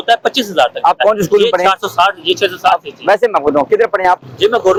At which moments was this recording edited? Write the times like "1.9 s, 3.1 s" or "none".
none